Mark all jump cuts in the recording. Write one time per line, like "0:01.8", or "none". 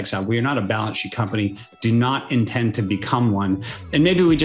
none